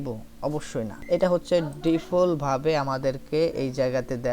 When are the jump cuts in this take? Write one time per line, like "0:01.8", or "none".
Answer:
0:01.0